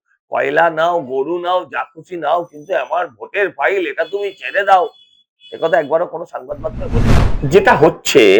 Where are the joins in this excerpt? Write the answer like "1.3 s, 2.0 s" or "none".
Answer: 7.2 s